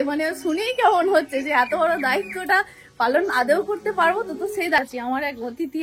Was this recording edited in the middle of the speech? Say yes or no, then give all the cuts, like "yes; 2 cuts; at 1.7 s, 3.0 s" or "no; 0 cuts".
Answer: yes; 1 cut; at 4.8 s